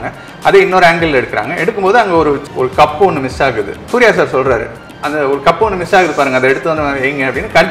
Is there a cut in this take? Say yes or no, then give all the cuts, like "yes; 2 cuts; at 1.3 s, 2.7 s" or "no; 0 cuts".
yes; 1 cut; at 3.9 s